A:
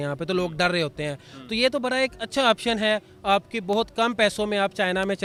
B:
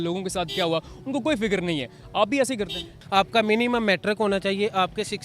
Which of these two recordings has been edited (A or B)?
B